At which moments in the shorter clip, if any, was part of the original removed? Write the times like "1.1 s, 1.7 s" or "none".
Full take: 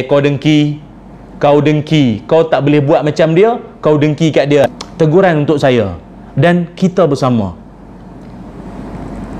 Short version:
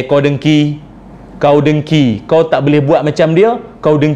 none

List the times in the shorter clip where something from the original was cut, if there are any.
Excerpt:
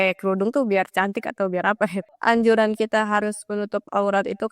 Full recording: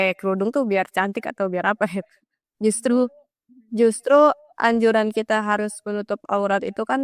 2.1 s

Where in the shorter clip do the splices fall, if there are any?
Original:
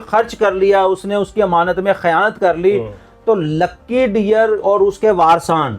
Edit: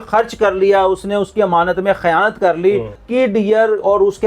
3.0 s

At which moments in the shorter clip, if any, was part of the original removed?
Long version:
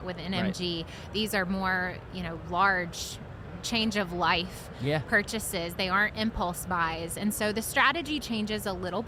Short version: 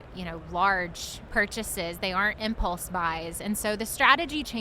1.3 s

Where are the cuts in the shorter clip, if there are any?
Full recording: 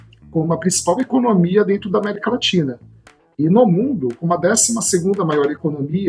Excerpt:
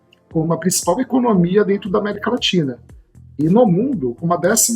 none

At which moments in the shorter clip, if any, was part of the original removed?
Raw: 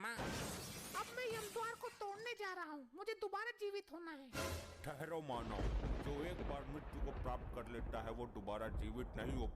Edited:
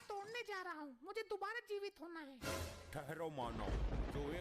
none

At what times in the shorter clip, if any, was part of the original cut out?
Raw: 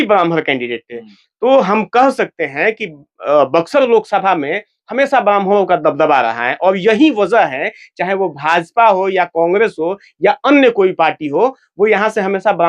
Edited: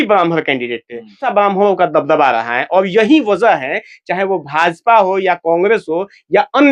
1.2 s

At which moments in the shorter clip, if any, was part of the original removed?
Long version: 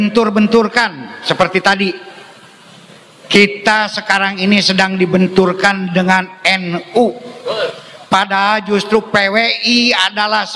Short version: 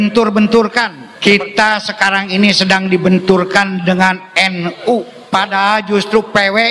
1.0 s, 5.2 s

